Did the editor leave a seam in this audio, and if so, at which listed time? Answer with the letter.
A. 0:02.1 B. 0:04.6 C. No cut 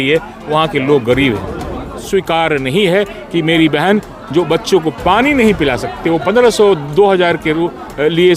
A